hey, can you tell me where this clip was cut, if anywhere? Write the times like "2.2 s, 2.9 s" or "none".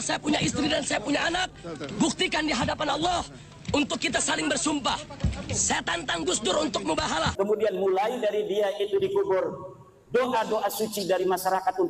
7.3 s